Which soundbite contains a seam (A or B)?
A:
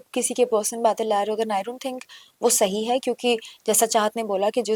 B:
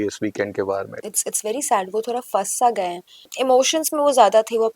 B